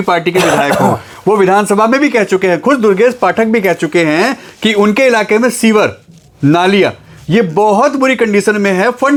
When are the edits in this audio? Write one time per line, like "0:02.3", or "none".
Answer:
none